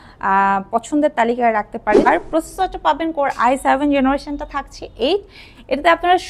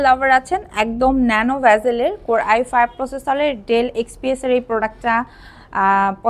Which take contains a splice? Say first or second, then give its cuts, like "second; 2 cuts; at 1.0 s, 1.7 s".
first; 1 cut; at 2.1 s